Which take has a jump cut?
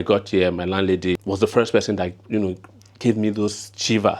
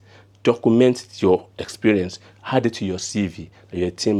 first; 1 cut; at 1.2 s

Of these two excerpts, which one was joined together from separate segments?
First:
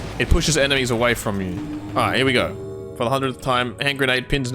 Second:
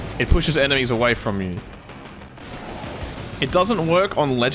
first; 1 cut; at 1.6 s

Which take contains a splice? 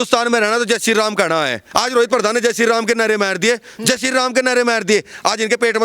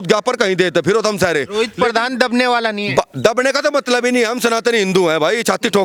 first; 1 cut; at 1.6 s

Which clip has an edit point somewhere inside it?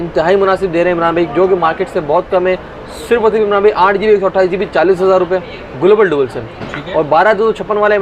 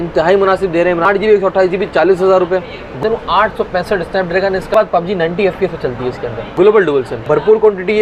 second; 5 cuts; at 1.1 s, 3.0 s, 4.7 s, 6.4 s, 7.1 s

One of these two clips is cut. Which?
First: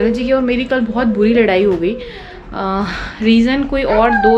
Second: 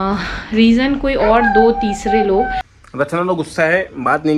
second; 1 cut; at 2.7 s

